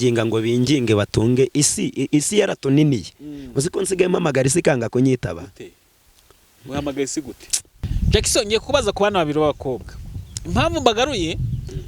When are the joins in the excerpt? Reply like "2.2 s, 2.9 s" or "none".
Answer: 7.8 s

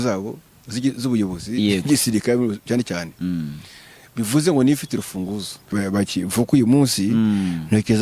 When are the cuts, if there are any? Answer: 5.7 s

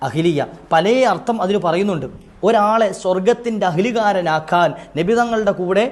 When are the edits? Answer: 2.2 s

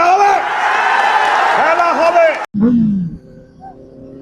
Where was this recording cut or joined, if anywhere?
2.5 s

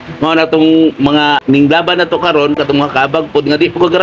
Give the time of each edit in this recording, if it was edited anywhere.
1.4 s, 2.6 s

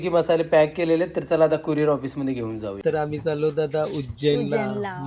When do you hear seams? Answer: 2.8 s

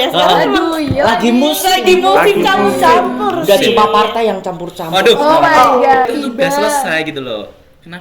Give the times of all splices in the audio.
6.1 s

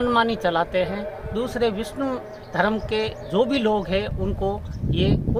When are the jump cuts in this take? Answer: none

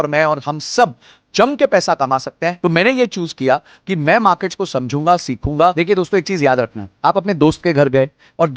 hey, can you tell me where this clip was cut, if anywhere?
2.5 s, 5.7 s

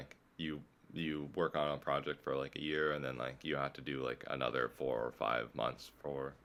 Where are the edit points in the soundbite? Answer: none

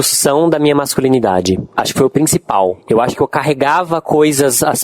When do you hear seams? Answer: 1.7 s, 2.8 s

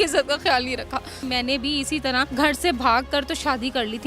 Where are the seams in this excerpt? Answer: 1.2 s, 2.3 s

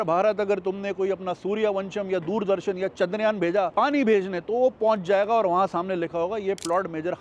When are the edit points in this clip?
none

